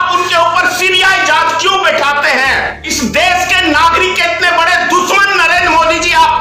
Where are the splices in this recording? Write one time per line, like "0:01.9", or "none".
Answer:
0:02.8